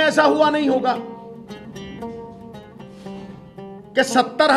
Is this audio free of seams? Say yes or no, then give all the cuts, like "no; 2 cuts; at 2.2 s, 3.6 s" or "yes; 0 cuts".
no; 2 cuts; at 1.0 s, 3.2 s